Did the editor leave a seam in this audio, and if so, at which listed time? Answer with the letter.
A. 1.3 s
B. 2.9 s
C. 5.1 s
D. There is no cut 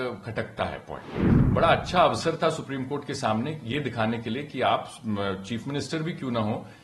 A